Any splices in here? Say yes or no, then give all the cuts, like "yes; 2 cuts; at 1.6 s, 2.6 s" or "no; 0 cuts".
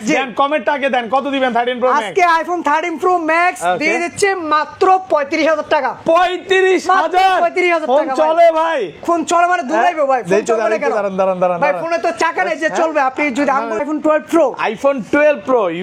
yes; 1 cut; at 13.8 s